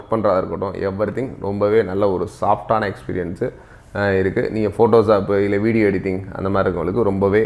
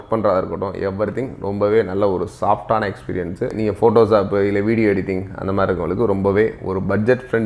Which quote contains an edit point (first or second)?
second